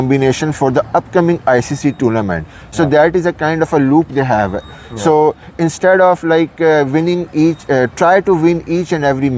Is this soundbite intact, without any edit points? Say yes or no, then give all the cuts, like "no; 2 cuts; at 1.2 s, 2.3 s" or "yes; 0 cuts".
yes; 0 cuts